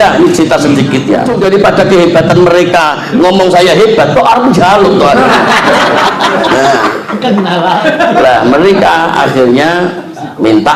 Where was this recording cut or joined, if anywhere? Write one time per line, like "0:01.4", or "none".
0:01.3